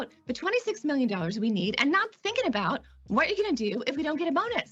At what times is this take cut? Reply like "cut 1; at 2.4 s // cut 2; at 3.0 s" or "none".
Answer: none